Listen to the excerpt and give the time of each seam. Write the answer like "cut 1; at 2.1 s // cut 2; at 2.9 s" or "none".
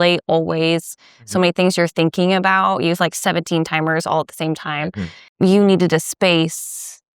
cut 1; at 5.2 s